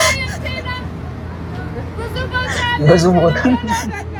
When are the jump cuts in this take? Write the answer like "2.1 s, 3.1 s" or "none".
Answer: none